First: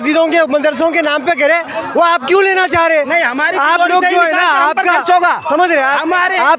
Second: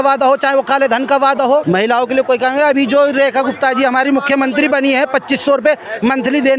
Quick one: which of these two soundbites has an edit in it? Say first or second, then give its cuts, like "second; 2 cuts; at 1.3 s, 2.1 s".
second; 1 cut; at 1.6 s